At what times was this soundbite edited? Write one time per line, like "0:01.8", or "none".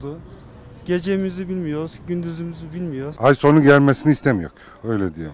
0:03.1